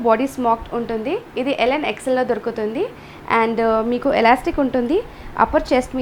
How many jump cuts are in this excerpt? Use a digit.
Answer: 0